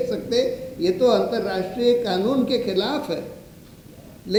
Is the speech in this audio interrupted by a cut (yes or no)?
no